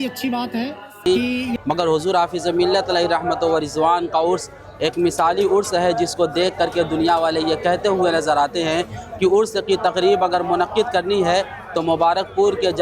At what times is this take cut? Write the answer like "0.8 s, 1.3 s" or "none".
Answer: 1.1 s